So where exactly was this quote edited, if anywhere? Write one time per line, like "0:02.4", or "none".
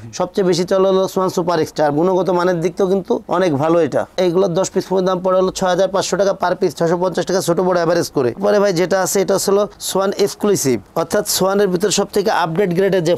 none